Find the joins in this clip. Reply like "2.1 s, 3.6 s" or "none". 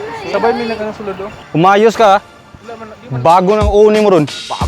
1.4 s